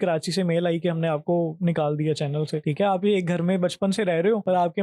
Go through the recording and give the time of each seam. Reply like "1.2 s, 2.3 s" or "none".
2.6 s